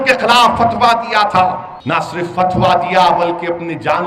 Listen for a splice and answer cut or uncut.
cut